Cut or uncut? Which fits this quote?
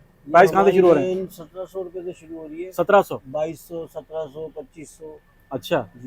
uncut